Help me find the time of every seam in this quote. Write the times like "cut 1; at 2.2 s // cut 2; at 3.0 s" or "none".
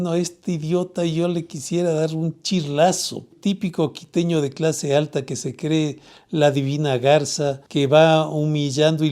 cut 1; at 3.3 s // cut 2; at 7.6 s

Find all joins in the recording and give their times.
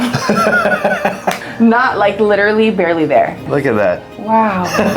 cut 1; at 1.4 s // cut 2; at 3.5 s

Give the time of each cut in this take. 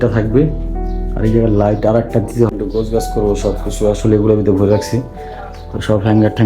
cut 1; at 2.5 s

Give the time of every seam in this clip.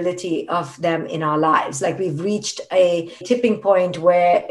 cut 1; at 3.2 s

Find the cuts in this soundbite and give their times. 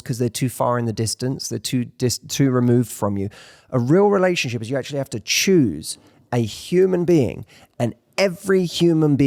none

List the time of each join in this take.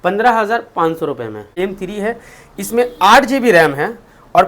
cut 1; at 1.5 s

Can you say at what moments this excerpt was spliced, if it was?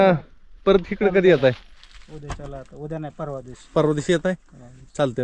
none

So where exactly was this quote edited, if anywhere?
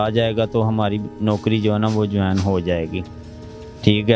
none

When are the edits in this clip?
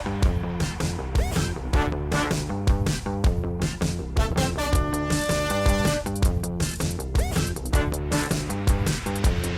cut 1; at 8.4 s

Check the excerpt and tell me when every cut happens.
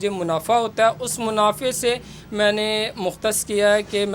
none

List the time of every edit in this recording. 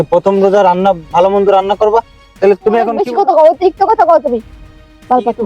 cut 1; at 3.0 s

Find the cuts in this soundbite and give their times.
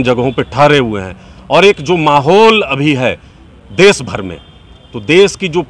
none

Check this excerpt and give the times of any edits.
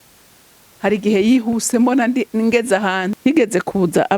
cut 1; at 3.1 s

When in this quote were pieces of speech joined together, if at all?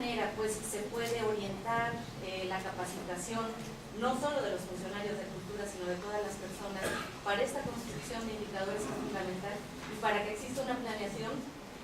cut 1; at 8.6 s

